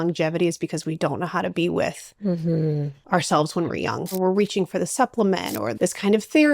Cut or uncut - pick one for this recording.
cut